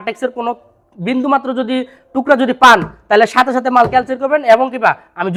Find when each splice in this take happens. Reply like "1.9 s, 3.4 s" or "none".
none

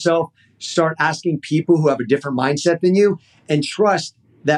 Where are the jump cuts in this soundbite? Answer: none

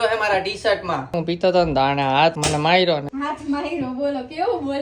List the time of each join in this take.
1.1 s, 2.4 s, 3.1 s

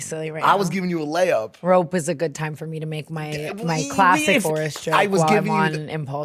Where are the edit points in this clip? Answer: 4.4 s

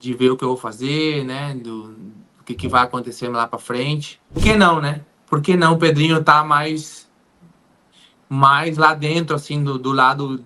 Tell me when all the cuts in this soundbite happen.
4.4 s

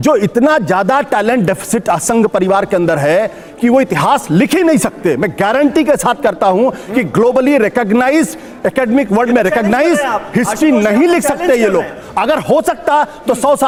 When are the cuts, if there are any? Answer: none

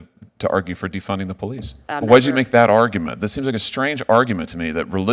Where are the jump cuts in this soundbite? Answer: 1.8 s

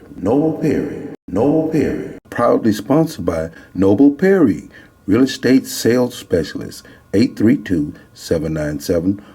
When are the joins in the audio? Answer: 2.1 s

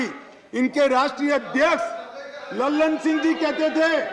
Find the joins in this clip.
none

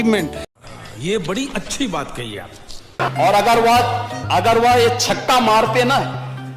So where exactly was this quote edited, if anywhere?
3.0 s

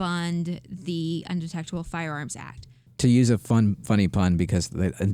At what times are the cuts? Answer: 2.8 s

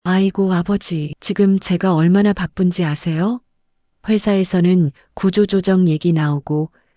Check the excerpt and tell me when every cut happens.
1.2 s

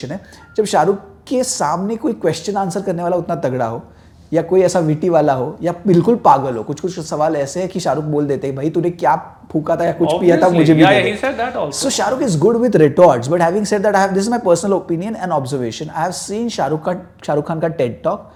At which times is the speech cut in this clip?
none

